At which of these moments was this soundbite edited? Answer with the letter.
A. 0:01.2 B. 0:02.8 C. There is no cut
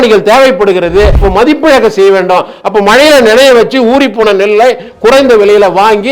A